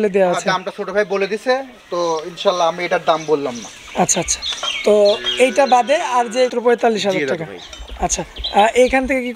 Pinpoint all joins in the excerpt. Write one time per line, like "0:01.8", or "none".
0:06.5